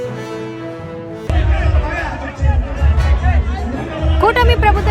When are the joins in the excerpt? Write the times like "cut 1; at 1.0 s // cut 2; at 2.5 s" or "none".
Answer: cut 1; at 1.2 s